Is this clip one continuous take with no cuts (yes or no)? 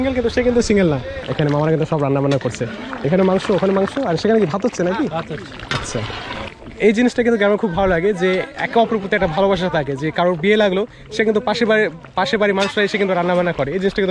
no